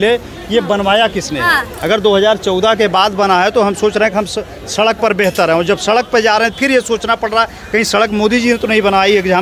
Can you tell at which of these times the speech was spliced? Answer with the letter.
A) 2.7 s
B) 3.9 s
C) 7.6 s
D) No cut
D